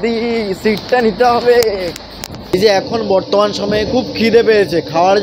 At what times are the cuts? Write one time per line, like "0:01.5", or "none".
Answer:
0:02.5